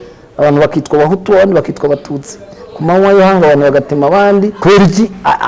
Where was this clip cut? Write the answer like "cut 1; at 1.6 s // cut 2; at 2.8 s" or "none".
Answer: cut 1; at 4.6 s